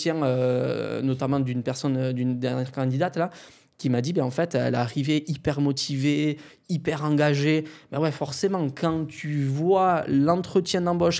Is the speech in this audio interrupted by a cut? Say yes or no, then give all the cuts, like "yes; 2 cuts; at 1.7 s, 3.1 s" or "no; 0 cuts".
no; 0 cuts